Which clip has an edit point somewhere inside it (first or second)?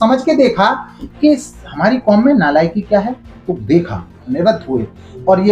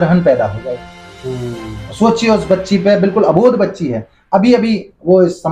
first